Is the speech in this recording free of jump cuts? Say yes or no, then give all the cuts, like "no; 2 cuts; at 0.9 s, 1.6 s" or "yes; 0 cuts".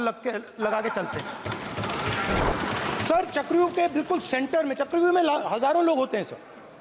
no; 1 cut; at 2.4 s